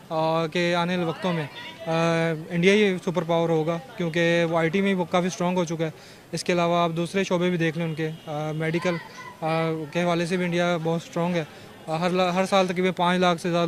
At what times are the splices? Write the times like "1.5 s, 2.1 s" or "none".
none